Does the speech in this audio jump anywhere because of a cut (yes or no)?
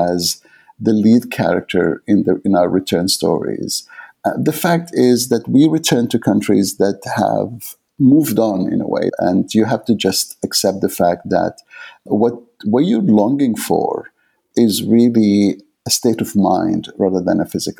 yes